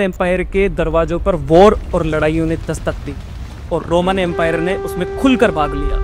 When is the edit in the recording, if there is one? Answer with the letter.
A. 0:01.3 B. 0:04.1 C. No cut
C